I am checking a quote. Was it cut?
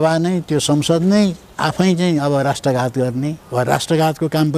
yes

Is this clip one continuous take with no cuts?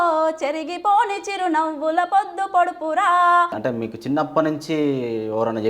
no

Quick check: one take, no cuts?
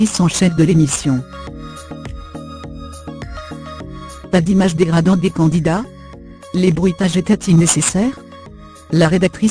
no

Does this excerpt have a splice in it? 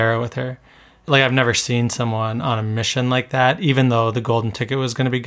yes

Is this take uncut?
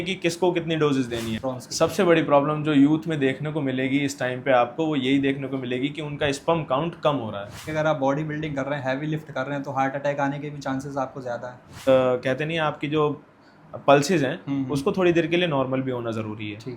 no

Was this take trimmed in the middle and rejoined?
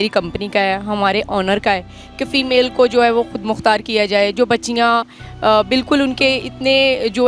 no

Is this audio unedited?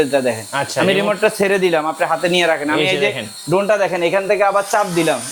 yes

